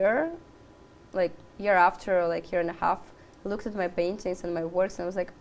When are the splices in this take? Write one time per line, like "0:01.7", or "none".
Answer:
none